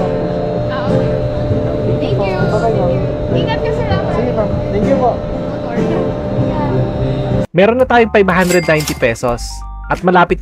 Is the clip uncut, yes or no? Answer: no